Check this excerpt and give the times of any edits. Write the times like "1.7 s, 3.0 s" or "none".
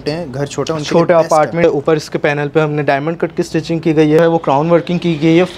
1.6 s, 4.2 s